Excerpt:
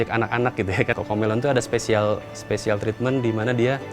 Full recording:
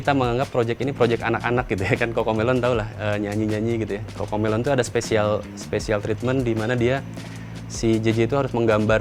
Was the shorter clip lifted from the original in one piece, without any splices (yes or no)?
no